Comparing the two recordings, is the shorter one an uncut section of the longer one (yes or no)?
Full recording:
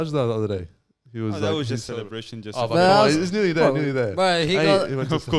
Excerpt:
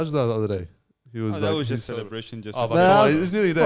yes